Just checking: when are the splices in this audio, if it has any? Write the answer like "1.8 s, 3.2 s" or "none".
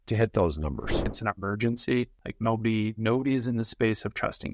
1.1 s, 2.2 s